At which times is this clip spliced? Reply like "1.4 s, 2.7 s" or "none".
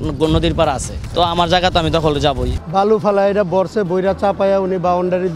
1.0 s, 2.5 s